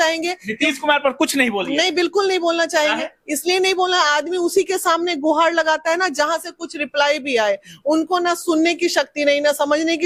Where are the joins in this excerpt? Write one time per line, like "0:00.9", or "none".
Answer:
none